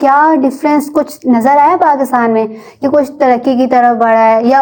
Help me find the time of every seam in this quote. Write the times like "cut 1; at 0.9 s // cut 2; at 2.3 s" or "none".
none